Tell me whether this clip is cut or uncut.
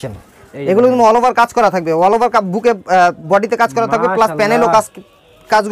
uncut